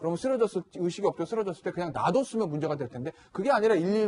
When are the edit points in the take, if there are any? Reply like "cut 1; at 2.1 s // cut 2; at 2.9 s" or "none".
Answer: none